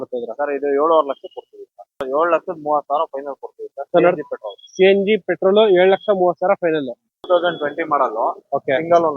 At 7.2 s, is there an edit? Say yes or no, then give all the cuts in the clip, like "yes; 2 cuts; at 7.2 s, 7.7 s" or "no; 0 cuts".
yes; 2 cuts; at 2.0 s, 7.2 s